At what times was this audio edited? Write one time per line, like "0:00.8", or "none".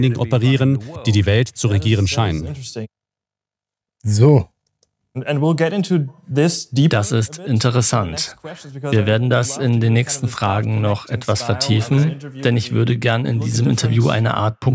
none